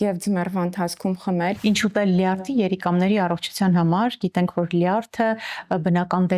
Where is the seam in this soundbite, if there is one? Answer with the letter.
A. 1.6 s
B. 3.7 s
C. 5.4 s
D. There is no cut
A